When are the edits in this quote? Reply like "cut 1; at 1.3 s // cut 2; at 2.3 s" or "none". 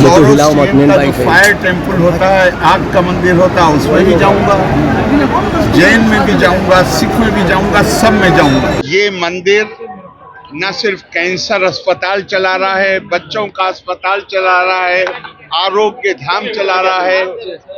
cut 1; at 8.8 s